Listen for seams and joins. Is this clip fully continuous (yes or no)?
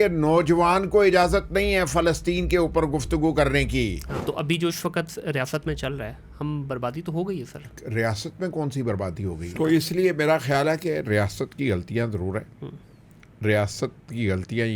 no